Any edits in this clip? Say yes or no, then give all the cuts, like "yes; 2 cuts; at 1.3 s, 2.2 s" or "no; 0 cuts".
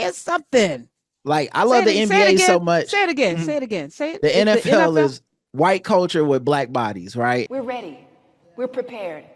yes; 1 cut; at 7.5 s